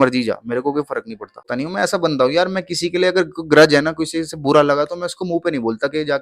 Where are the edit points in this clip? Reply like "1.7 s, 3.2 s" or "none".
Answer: 1.5 s